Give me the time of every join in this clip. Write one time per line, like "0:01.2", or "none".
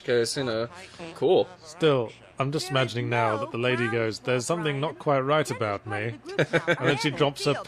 none